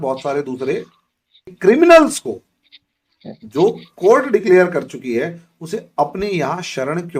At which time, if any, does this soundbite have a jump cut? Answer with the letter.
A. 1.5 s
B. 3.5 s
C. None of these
A